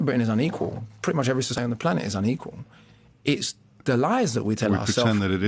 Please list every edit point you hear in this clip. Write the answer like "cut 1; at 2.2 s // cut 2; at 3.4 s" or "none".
cut 1; at 1.6 s